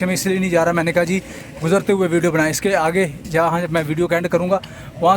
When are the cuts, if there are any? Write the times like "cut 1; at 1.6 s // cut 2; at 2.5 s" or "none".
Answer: none